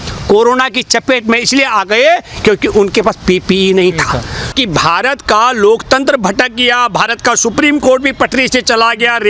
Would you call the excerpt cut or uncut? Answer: cut